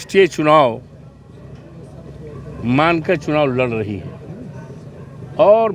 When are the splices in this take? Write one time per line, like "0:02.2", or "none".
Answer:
none